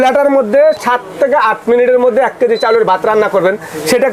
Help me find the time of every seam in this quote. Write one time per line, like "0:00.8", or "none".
none